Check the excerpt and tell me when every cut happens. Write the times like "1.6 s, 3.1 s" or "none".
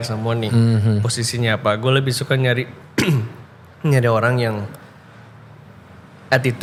none